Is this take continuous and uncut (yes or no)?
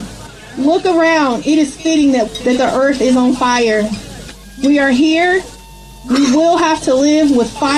no